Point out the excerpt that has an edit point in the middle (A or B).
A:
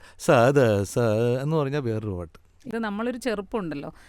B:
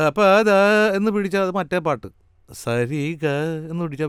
A